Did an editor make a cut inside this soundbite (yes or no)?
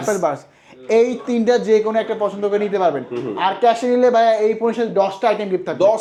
no